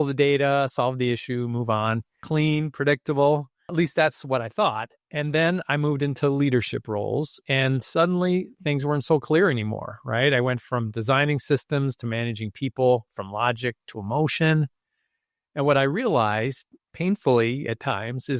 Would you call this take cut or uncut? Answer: cut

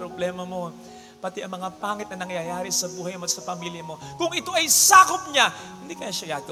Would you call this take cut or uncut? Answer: uncut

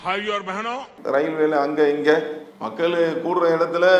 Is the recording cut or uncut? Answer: cut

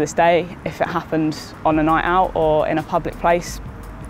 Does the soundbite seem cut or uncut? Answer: uncut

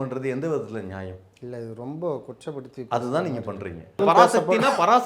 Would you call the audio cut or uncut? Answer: cut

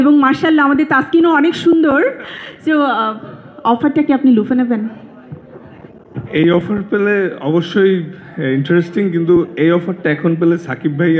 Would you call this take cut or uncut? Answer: uncut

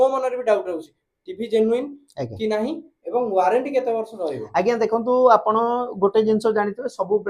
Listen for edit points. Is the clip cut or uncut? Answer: uncut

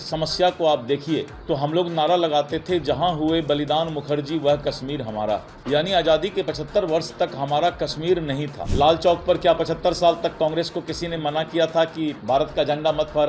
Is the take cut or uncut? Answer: cut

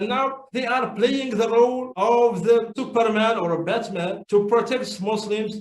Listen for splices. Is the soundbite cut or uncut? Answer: cut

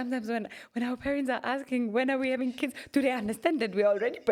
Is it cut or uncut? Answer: uncut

